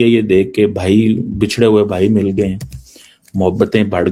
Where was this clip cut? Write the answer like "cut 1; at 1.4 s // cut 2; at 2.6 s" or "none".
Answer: none